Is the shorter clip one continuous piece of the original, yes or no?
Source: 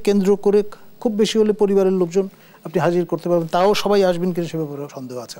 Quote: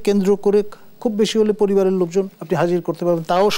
no